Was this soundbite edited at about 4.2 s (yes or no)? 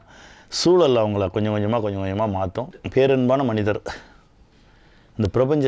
no